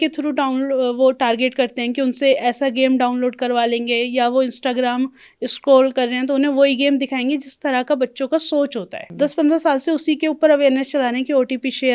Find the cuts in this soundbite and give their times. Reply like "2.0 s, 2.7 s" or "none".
9.0 s